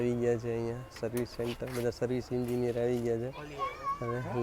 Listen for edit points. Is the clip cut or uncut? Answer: uncut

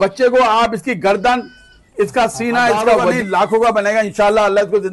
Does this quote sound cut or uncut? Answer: cut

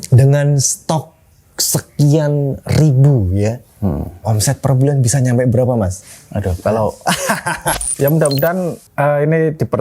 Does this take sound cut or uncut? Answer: cut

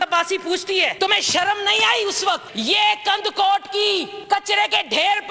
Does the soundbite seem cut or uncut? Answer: cut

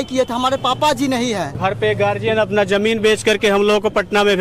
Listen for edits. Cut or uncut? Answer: cut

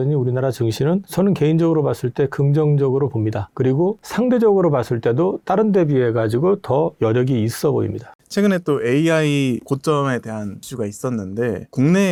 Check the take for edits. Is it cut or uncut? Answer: uncut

